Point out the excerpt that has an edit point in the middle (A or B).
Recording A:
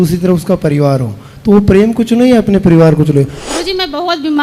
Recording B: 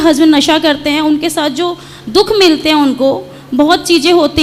A